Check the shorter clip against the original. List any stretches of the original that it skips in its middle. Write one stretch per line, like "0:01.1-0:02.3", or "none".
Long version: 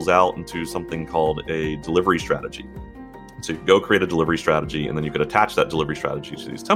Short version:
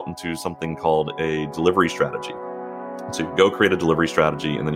none